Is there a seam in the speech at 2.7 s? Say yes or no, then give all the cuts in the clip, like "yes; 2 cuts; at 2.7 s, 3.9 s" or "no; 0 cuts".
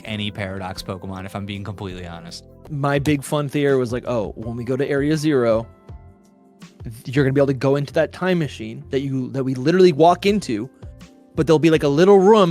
yes; 1 cut; at 2.7 s